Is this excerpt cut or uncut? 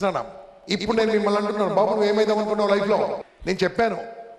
cut